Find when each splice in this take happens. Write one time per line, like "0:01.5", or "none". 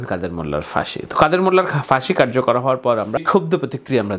0:03.2